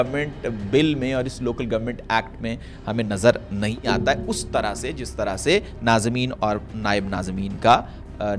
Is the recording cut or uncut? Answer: uncut